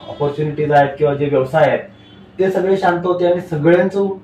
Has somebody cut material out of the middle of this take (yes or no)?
no